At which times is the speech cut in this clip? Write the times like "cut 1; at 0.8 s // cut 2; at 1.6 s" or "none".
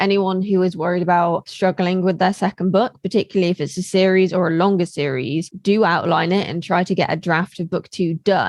cut 1; at 1.5 s // cut 2; at 5.5 s